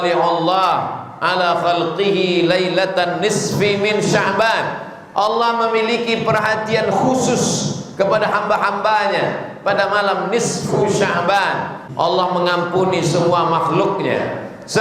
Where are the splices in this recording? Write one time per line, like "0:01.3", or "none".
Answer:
0:11.8